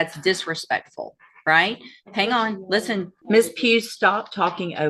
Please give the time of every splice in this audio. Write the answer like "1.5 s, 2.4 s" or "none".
3.1 s